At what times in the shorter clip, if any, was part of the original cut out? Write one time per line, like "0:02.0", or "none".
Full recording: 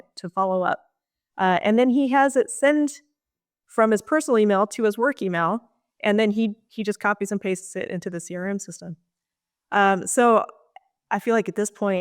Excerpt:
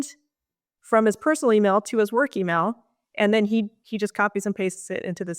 none